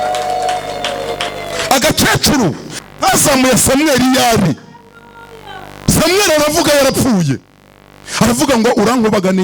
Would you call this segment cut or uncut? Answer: uncut